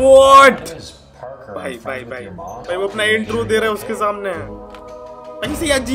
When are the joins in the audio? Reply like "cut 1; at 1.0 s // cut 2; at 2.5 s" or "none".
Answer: none